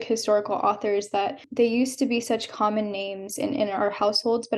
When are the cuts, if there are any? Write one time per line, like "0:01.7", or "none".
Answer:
0:01.4